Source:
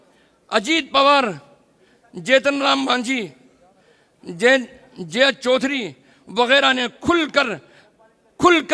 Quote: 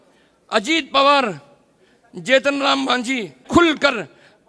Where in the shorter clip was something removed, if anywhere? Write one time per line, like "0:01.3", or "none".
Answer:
0:03.4